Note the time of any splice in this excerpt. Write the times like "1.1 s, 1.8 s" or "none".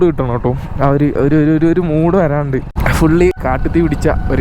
2.8 s, 3.4 s